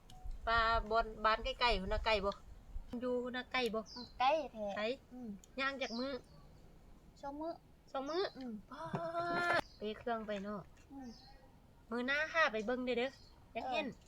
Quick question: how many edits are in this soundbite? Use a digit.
2